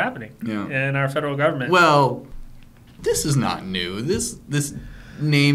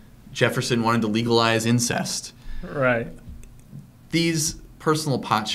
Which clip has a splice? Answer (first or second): first